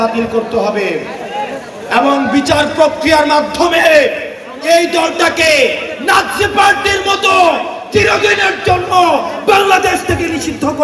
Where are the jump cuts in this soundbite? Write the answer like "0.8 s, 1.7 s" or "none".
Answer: none